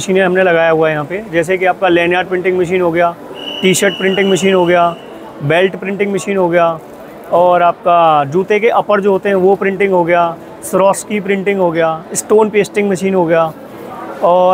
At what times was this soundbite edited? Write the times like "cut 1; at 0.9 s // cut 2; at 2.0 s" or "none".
none